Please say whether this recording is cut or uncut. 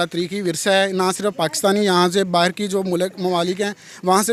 uncut